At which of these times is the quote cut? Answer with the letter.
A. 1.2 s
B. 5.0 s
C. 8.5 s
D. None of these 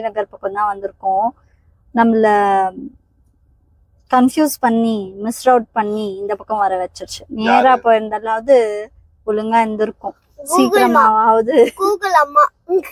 D